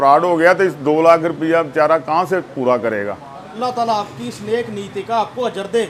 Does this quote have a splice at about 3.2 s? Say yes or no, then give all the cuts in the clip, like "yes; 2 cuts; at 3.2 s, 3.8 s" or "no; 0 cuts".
no; 0 cuts